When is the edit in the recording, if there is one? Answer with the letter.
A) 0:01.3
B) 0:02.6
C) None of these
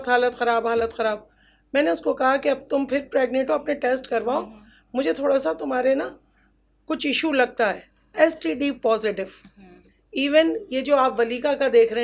C